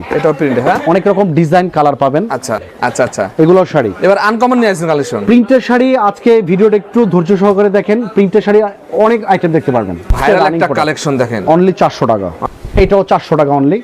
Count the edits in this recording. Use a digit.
3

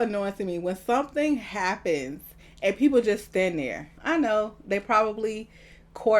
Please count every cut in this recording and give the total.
1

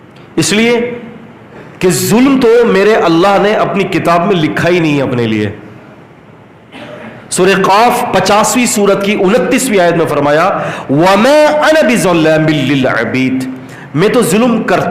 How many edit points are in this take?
0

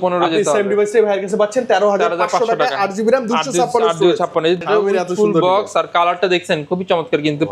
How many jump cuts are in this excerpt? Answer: 1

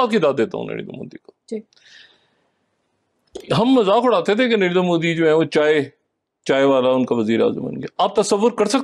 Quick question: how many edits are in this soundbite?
0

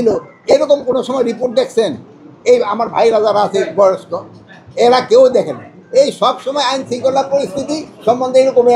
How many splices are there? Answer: 0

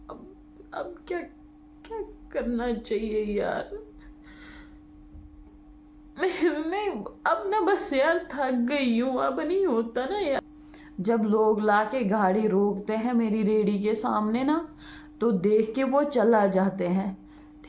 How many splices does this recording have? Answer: 1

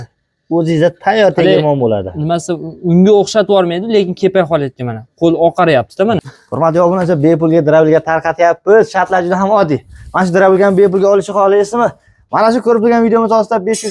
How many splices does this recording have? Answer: 1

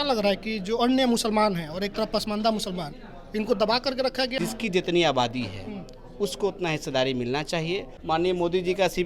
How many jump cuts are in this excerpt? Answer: 2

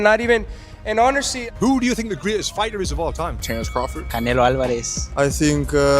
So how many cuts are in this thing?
1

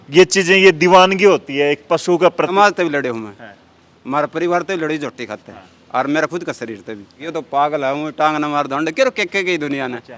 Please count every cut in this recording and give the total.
2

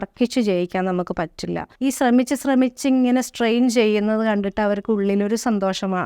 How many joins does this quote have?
1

